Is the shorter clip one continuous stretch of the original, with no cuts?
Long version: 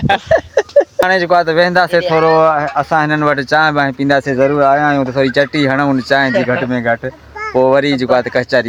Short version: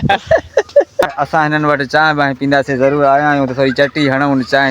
no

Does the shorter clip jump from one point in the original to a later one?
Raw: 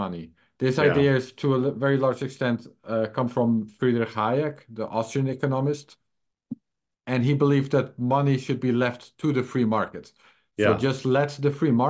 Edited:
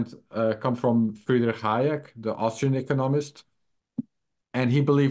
no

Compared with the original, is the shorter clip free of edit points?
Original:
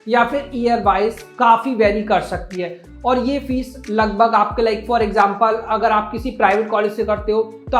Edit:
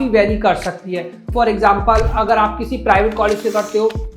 no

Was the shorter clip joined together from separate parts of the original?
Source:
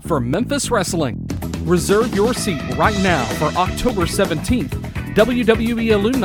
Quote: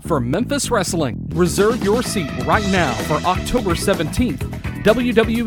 yes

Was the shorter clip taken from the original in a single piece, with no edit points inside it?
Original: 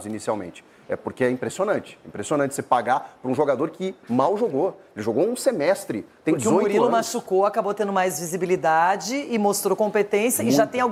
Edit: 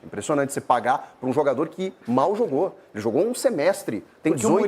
yes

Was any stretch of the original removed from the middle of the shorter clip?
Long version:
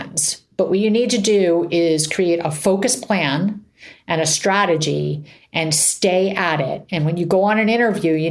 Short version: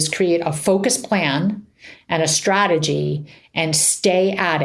no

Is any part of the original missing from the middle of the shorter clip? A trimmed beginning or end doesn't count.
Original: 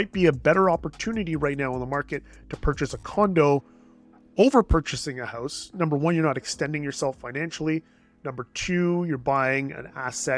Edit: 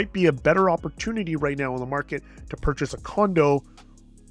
no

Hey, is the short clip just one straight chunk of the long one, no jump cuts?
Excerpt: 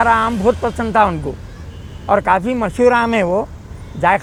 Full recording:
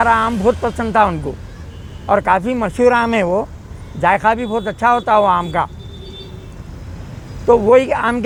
yes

